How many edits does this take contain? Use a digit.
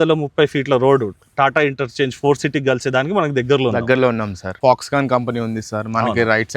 1